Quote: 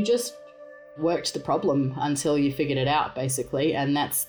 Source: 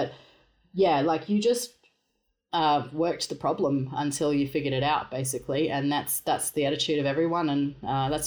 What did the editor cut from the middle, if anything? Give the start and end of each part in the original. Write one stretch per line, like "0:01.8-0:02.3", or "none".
0:02.3-0:02.9